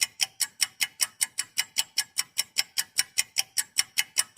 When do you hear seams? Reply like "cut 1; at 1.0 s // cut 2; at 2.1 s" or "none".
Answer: cut 1; at 2.3 s

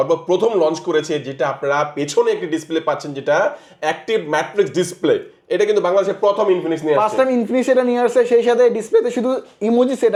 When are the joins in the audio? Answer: none

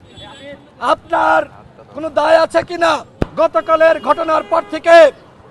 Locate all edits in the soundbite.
cut 1; at 3.3 s

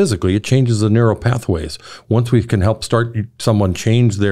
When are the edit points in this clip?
none

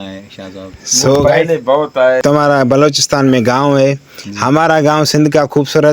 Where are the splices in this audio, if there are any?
cut 1; at 2.2 s

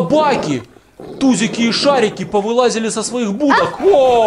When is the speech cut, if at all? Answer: none

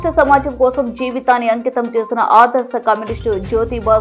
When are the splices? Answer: none

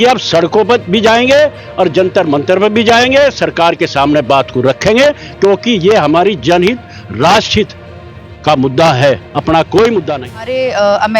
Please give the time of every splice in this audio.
cut 1; at 10.2 s

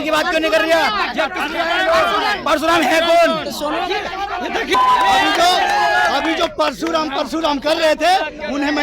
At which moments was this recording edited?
cut 1; at 4.7 s

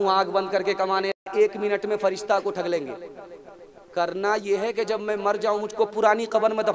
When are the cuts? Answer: cut 1; at 1.1 s

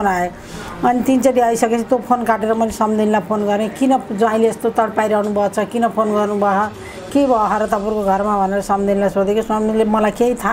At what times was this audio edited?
none

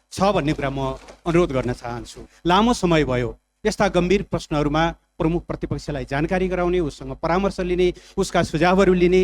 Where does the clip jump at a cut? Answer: cut 1; at 2.3 s

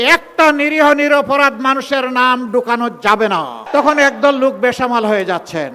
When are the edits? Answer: cut 1; at 3.6 s

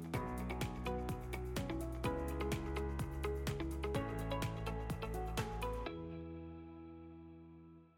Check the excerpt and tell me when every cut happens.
none

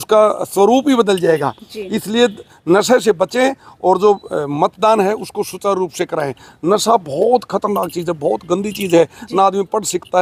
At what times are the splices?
none

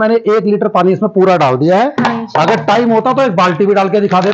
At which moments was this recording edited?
none

